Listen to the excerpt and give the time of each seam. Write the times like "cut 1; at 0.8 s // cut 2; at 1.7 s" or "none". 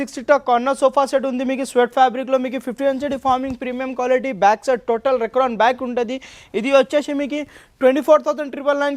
none